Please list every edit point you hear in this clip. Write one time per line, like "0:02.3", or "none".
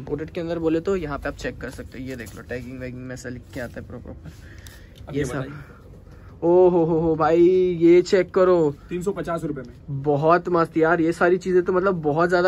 none